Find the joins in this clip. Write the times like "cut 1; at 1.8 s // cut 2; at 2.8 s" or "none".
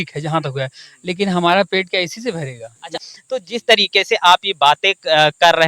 cut 1; at 3.0 s